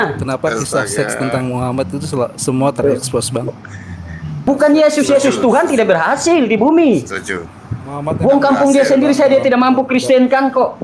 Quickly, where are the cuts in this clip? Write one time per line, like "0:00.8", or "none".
0:04.5